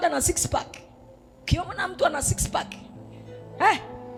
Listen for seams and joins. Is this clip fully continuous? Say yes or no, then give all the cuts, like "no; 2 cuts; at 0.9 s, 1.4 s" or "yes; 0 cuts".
yes; 0 cuts